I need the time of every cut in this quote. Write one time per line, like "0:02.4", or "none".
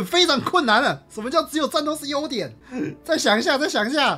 none

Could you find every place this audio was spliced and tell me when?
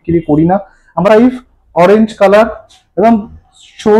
0:01.1

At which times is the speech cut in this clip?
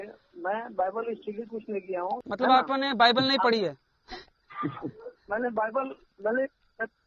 0:02.2

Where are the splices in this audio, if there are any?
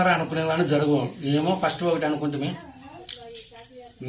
none

